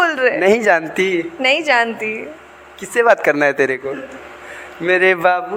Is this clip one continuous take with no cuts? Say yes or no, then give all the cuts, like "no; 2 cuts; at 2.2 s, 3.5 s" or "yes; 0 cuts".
yes; 0 cuts